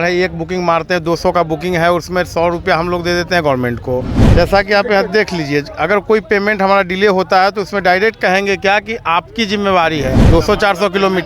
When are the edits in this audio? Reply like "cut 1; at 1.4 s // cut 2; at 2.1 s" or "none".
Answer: cut 1; at 4.2 s // cut 2; at 10.2 s